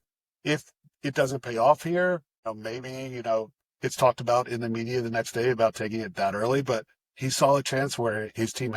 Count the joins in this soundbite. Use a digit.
1